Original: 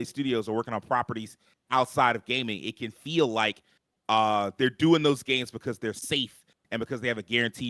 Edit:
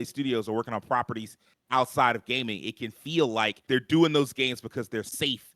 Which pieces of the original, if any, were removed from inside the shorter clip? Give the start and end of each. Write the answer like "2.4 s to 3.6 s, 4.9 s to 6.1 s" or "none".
3.6 s to 4.5 s